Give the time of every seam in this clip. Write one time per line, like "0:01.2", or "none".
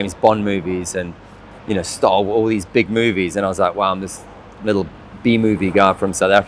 none